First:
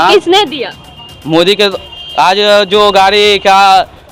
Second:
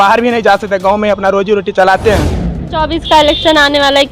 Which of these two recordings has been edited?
second; 1 cut; at 2.8 s

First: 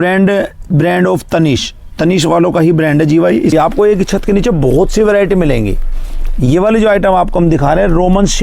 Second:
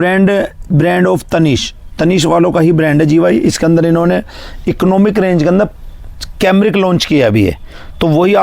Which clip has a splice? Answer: first; 1 cut; at 3.5 s

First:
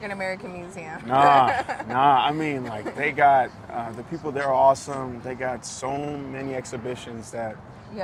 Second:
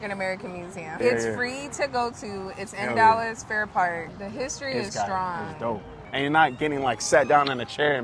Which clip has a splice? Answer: second; 3 cuts; at 1.0 s, 4.0 s, 6.0 s

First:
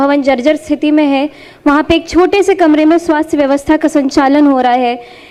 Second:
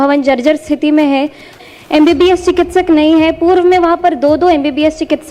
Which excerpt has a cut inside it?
second; 1 cut; at 1.5 s

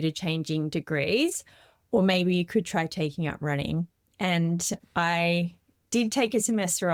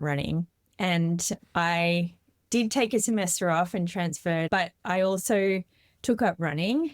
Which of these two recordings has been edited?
second; 1 cut; at 4.5 s

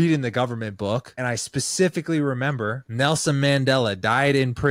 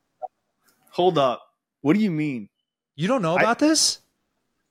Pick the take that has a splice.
first; 2 cuts; at 1.1 s, 2.8 s

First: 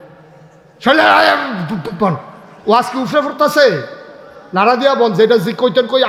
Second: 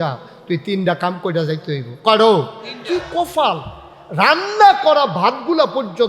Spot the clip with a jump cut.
second; 1 cut; at 2.7 s

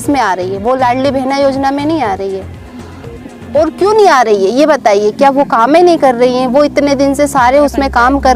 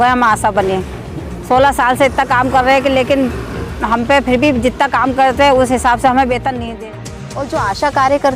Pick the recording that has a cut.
second; 1 cut; at 6.8 s

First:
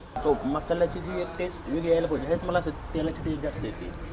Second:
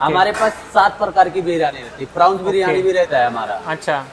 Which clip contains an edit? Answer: second; 1 cut; at 3.1 s

